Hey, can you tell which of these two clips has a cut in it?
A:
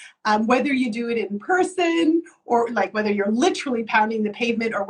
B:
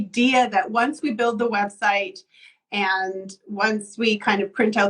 B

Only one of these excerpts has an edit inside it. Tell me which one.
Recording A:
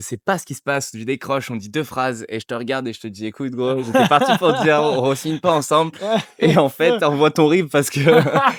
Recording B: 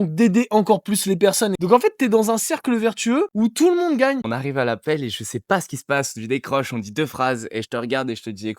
B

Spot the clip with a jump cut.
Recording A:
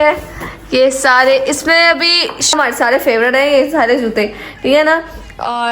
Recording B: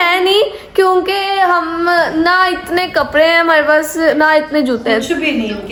A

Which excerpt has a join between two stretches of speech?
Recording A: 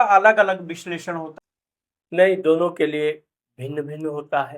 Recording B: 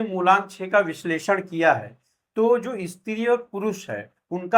A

